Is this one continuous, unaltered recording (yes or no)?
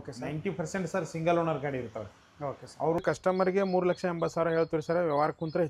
no